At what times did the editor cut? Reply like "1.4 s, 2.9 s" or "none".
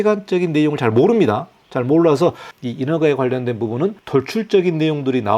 2.5 s, 4.0 s